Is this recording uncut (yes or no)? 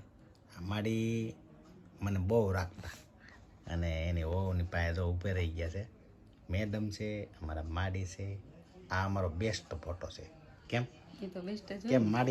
yes